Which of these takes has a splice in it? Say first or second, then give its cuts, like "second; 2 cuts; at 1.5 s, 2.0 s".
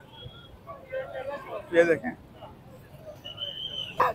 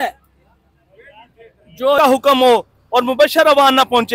second; 1 cut; at 2.0 s